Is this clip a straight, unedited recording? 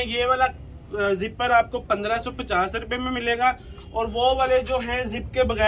yes; 0 cuts

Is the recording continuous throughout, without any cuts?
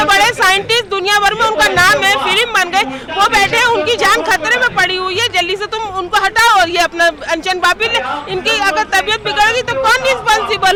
yes; 0 cuts

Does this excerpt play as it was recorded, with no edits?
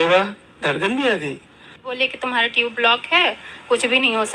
no; 1 cut; at 2.0 s

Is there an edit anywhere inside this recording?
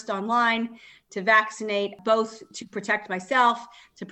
no; 0 cuts

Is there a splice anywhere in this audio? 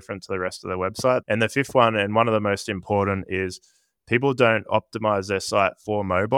yes; 1 cut; at 1.2 s

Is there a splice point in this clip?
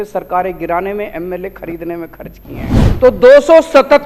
yes; 1 cut; at 2.3 s

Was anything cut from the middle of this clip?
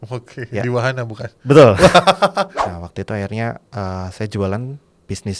yes; 1 cut; at 2.6 s

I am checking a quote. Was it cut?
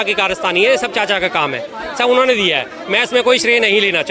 no; 0 cuts

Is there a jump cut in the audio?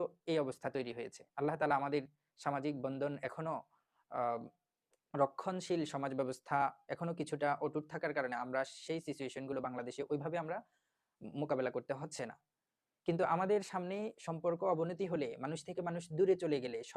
no; 0 cuts

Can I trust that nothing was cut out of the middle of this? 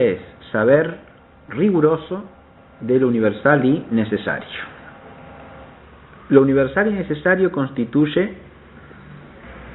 yes; 0 cuts

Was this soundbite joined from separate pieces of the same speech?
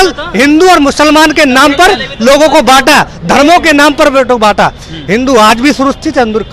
no; 0 cuts

